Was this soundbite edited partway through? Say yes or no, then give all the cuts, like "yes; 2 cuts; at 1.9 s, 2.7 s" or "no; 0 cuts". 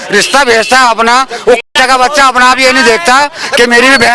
no; 0 cuts